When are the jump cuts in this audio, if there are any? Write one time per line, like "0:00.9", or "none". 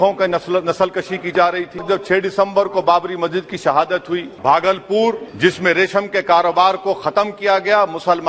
0:01.8
0:04.3
0:05.3